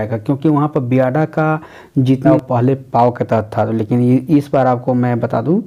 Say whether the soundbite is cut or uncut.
cut